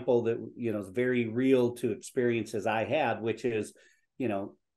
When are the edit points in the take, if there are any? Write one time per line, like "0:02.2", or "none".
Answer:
none